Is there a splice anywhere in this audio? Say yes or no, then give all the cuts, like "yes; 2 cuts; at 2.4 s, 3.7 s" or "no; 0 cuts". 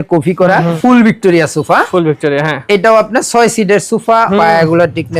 yes; 2 cuts; at 0.8 s, 4.3 s